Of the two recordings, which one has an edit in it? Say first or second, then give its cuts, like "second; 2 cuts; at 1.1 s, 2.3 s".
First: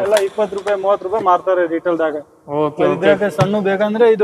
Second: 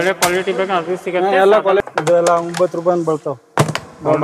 second; 1 cut; at 1.8 s